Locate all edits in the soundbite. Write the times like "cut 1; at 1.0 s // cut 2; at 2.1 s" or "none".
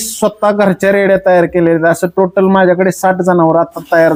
none

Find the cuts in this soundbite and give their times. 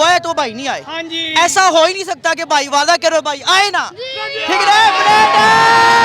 none

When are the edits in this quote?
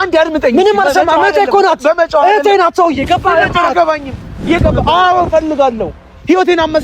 cut 1; at 4.6 s

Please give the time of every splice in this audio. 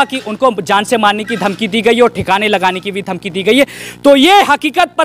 none

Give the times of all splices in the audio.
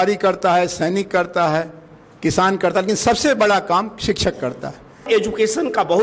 cut 1; at 5.0 s

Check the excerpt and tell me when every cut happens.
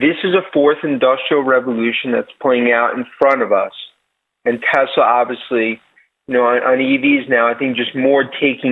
none

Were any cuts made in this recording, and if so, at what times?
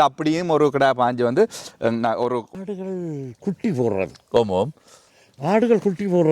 cut 1; at 2.5 s

